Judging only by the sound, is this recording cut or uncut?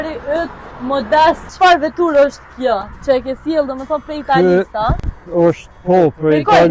cut